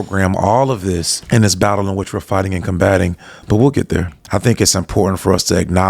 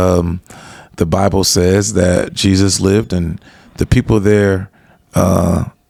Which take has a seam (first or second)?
first